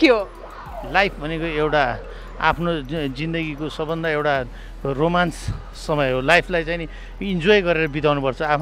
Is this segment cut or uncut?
uncut